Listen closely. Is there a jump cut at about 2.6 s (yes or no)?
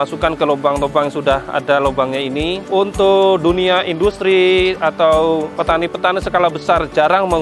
yes